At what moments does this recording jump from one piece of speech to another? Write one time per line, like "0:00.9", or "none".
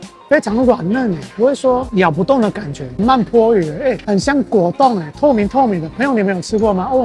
0:03.0
0:04.0